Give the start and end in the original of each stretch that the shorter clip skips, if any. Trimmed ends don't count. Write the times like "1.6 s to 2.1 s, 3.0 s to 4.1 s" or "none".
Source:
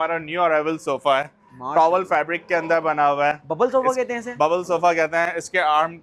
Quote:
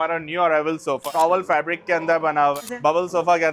1.0 s to 1.6 s, 3.2 s to 4.1 s